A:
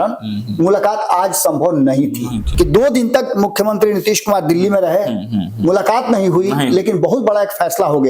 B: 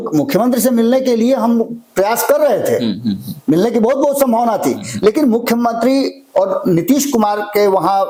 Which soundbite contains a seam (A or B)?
A